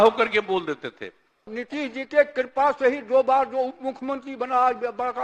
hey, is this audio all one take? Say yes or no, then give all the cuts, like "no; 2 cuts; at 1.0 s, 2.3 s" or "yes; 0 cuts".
no; 1 cut; at 1.6 s